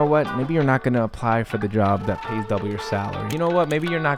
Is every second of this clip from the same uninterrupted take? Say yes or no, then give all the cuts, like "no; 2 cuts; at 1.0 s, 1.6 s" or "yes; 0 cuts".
no; 1 cut; at 3.2 s